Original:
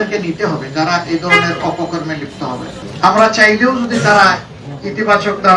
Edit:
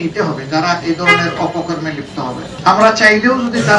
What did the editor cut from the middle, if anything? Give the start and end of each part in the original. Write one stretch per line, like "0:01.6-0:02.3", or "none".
0:02.7-0:02.9